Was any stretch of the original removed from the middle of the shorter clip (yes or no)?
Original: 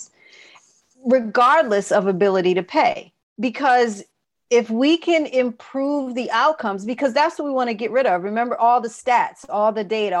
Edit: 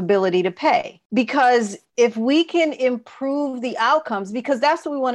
yes